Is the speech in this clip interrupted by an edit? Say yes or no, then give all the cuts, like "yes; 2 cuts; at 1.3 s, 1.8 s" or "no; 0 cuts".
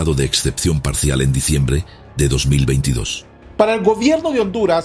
yes; 1 cut; at 3.4 s